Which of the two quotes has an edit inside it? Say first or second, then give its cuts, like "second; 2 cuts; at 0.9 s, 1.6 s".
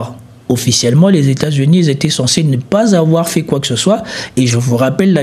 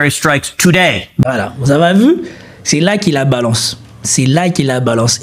second; 1 cut; at 1.1 s